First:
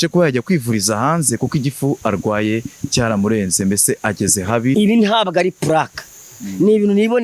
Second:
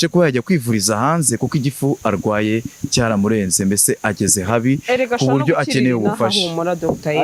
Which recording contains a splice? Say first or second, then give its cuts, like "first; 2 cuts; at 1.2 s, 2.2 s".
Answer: first; 1 cut; at 4.7 s